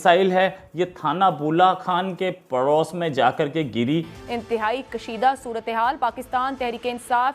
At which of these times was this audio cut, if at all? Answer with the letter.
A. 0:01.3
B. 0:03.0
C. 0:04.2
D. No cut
C